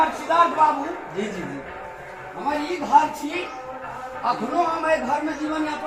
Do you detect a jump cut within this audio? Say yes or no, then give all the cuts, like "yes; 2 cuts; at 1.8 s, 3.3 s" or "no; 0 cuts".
no; 0 cuts